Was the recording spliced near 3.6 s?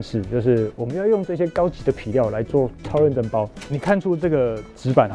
yes; 1 cut; at 3.6 s

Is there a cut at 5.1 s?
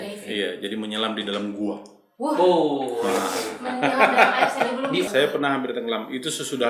yes; 1 cut; at 5.1 s

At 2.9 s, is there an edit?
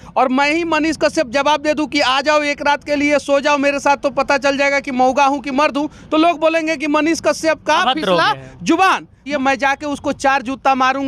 no; 1 cut; at 9.2 s

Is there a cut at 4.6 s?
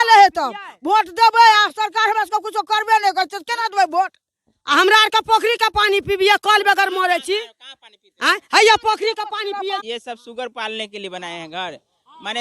no; 1 cut; at 9.8 s

